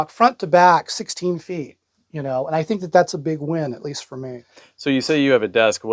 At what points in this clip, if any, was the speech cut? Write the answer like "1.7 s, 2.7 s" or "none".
none